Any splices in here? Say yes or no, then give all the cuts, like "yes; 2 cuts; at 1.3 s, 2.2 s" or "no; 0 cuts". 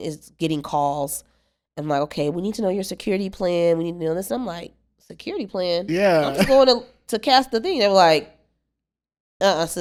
no; 0 cuts